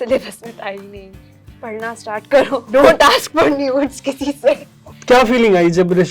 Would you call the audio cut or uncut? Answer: cut